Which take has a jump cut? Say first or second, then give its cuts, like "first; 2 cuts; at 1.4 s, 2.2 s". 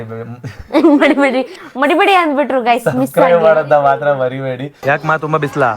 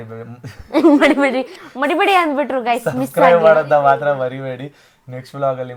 first; 1 cut; at 4.7 s